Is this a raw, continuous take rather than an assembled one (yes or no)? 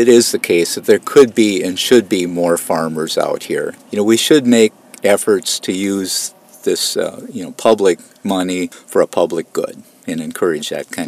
no